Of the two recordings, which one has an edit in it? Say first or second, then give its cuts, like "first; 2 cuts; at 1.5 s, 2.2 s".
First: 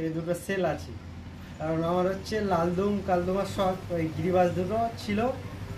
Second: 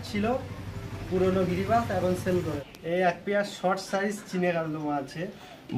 second; 1 cut; at 2.6 s